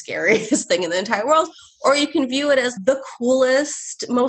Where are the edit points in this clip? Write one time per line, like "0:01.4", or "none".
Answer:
0:02.7